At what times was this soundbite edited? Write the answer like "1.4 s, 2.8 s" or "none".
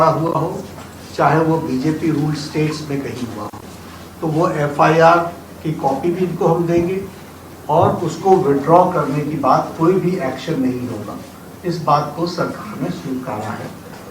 none